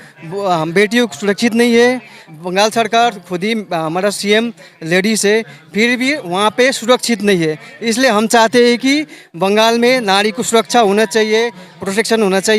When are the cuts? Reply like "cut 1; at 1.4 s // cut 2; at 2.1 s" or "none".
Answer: cut 1; at 2.2 s

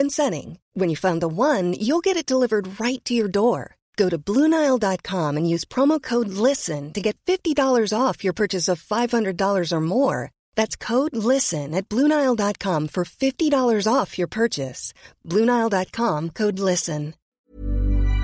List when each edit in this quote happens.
cut 1; at 17.2 s

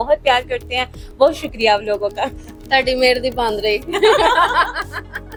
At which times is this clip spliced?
none

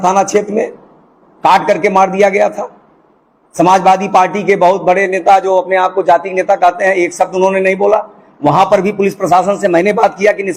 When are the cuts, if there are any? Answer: none

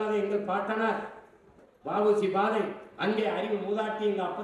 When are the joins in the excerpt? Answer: none

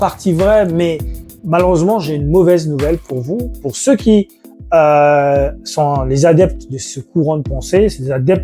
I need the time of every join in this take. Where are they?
none

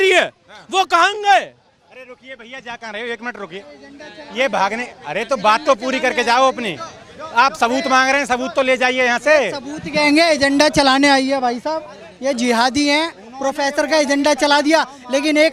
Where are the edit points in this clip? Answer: none

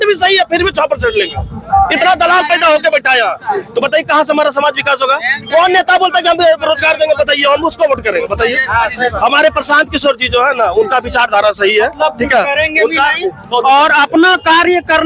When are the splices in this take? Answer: none

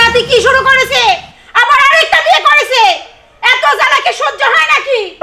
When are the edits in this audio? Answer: none

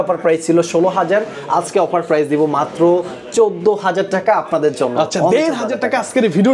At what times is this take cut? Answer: none

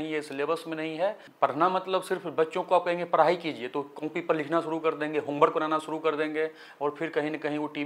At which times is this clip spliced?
cut 1; at 1.2 s

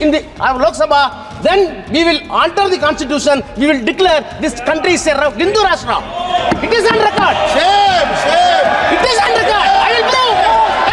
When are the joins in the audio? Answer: none

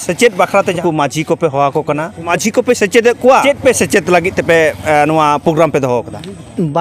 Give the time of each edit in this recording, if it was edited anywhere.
cut 1; at 0.8 s // cut 2; at 2.3 s // cut 3; at 3.4 s

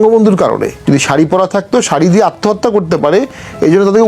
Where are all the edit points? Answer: cut 1; at 0.9 s

